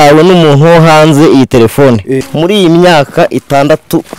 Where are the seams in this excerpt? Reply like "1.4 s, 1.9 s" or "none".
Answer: 2.2 s